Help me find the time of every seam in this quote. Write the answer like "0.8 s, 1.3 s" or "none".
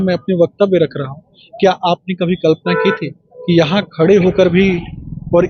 none